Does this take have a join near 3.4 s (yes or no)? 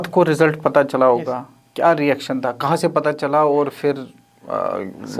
no